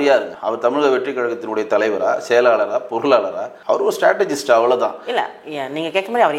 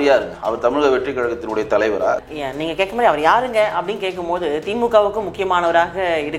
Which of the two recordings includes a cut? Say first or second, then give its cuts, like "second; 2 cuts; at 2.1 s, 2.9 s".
second; 1 cut; at 2.2 s